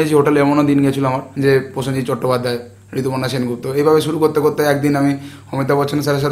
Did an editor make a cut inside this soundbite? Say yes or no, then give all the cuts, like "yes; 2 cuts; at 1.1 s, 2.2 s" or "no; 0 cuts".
yes; 1 cut; at 1.3 s